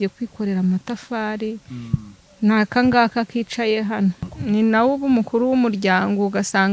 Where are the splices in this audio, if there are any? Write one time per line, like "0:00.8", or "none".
0:04.3